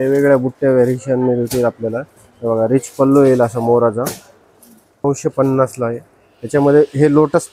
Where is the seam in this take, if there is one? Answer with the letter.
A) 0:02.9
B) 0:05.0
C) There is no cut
B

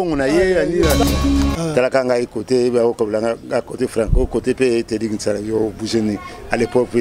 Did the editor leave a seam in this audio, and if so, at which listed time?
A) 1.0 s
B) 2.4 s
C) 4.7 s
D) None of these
A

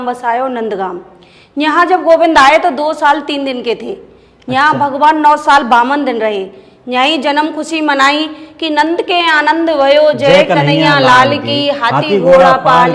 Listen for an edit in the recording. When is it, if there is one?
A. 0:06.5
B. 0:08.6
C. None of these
C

